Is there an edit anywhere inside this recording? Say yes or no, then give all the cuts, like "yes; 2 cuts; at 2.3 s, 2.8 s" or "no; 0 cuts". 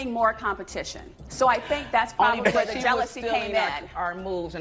no; 0 cuts